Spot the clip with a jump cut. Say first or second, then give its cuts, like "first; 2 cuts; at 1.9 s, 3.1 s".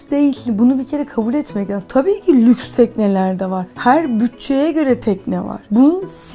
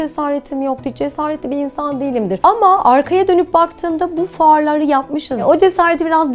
second; 2 cuts; at 2.4 s, 5.3 s